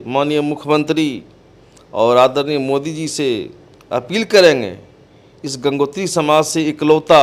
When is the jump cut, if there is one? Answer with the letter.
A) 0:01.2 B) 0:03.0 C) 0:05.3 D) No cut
D